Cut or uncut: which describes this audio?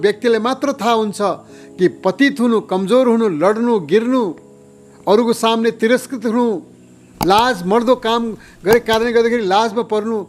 uncut